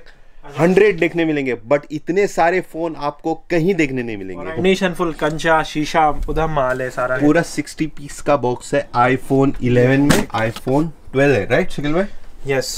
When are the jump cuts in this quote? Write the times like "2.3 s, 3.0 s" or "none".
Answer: 4.6 s, 7.2 s, 10.3 s